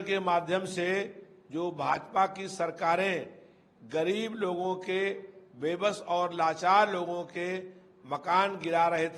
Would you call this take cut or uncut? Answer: uncut